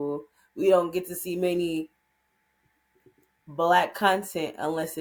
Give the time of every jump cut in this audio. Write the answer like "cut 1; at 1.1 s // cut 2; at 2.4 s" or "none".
none